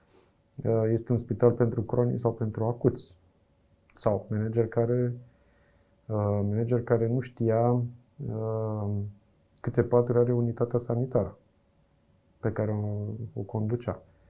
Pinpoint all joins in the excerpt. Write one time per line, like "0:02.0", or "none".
none